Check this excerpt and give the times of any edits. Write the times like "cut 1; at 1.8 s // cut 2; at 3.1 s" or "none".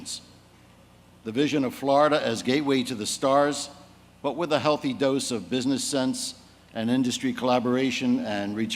cut 1; at 2.8 s